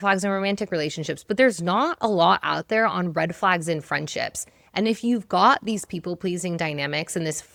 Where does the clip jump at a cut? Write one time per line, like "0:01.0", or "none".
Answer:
none